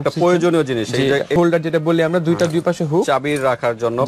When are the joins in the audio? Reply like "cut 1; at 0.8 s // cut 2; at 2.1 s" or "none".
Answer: cut 1; at 1.4 s